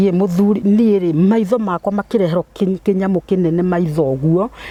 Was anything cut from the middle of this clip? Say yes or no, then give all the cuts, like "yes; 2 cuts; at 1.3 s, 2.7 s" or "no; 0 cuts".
no; 0 cuts